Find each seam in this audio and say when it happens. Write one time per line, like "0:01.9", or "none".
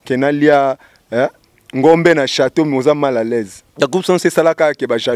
0:03.6

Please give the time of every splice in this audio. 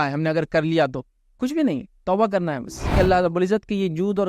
0:03.0

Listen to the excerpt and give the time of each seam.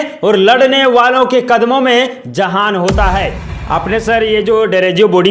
0:03.4

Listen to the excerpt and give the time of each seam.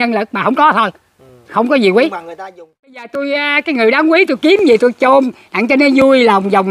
0:03.1

